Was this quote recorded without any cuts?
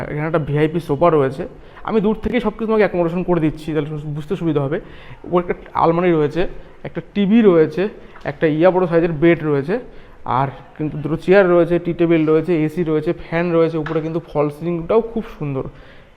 yes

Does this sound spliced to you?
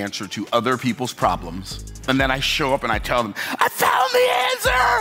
no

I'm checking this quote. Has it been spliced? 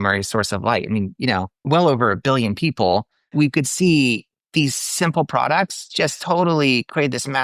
yes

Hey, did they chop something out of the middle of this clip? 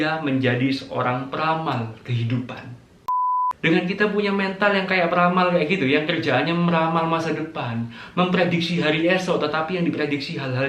yes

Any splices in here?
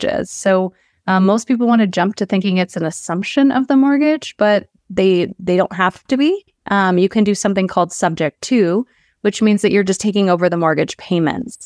yes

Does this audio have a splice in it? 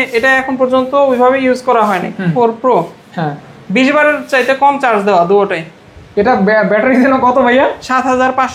yes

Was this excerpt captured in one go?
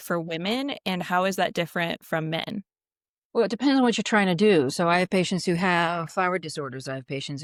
yes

